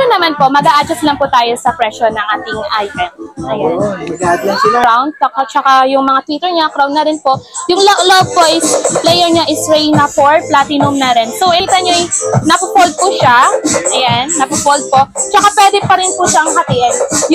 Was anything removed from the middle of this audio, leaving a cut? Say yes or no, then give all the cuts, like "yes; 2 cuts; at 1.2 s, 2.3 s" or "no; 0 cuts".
yes; 2 cuts; at 4.8 s, 11.6 s